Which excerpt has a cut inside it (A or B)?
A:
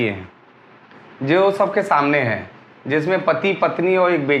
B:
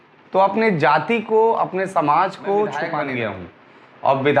B